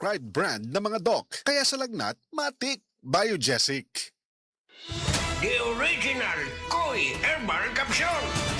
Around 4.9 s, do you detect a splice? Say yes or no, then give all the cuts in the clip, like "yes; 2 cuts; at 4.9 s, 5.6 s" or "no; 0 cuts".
yes; 1 cut; at 4.9 s